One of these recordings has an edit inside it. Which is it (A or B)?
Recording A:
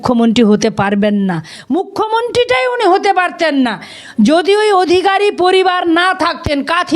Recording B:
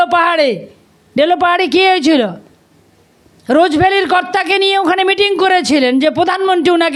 A